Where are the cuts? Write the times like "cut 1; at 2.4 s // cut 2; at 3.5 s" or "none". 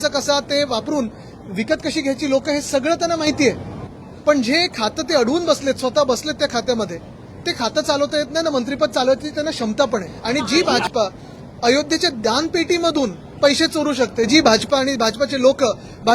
cut 1; at 10.1 s

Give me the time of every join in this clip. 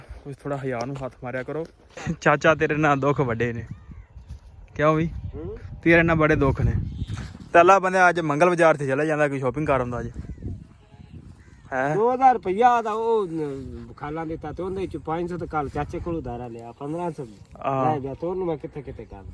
cut 1; at 1.9 s

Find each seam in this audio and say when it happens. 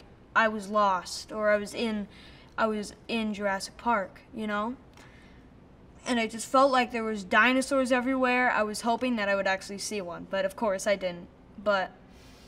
none

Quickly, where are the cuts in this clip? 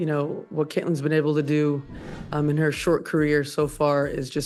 none

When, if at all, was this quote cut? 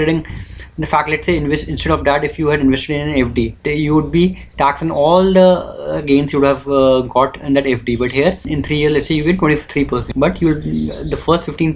cut 1; at 3.6 s // cut 2; at 8.5 s // cut 3; at 10.1 s

